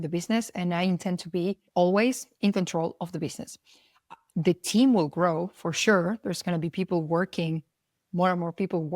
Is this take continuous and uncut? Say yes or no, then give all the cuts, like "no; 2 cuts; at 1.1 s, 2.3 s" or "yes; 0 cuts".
no; 1 cut; at 1.6 s